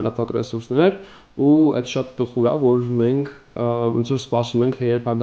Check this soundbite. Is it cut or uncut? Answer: uncut